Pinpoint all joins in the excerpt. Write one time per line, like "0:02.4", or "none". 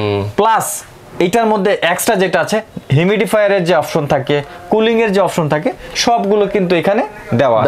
none